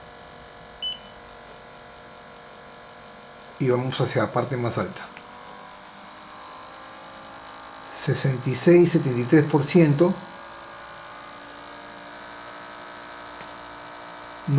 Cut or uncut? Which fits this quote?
uncut